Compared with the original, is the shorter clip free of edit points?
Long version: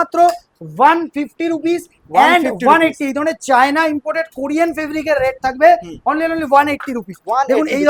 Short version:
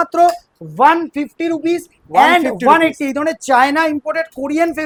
yes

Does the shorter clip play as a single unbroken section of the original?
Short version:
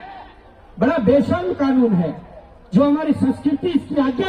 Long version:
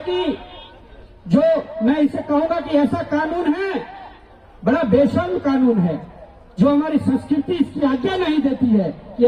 yes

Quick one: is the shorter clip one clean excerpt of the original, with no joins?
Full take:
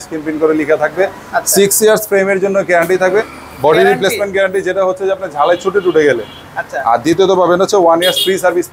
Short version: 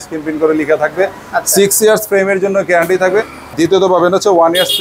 no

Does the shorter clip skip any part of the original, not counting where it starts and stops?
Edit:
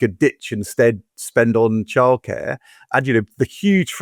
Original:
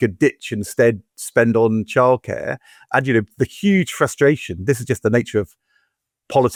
no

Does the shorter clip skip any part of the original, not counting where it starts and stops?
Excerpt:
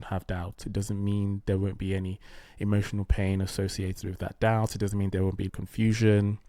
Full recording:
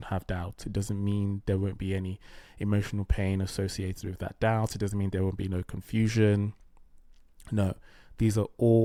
yes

